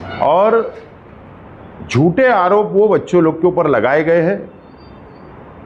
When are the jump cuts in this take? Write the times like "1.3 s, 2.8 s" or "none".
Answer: none

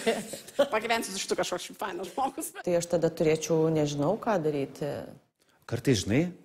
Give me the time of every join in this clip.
2.5 s

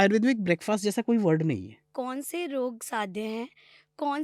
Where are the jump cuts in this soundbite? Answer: 1.9 s

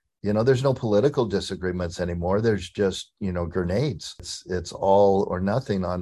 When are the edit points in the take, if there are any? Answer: 4.3 s

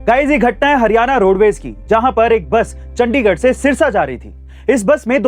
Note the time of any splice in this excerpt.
none

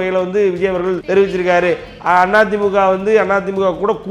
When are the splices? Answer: 1.0 s

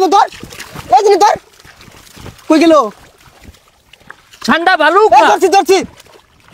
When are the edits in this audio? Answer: none

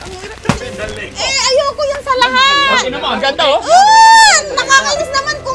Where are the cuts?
1.2 s

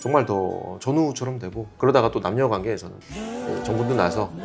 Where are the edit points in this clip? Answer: 1.6 s

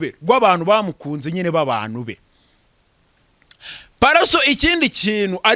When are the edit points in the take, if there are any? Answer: none

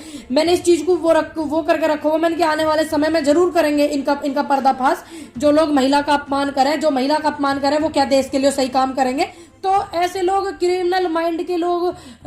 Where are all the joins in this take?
9.4 s

